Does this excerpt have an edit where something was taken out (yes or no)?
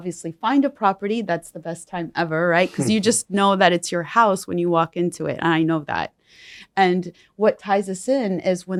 no